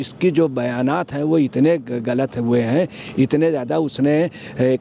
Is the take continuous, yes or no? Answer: yes